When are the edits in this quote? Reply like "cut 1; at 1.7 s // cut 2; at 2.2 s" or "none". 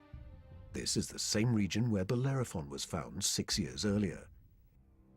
cut 1; at 1.2 s

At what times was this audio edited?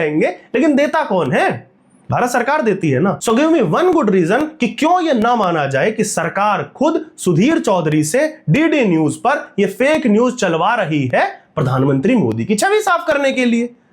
none

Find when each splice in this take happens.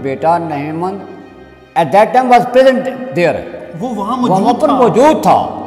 none

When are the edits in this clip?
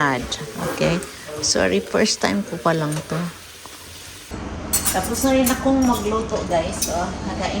cut 1; at 4.3 s

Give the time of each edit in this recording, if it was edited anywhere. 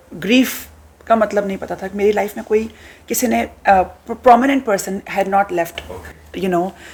none

